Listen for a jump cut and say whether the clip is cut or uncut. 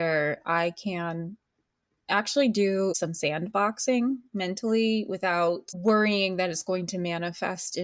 cut